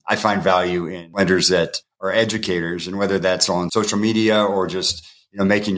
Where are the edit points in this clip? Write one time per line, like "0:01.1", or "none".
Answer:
0:01.0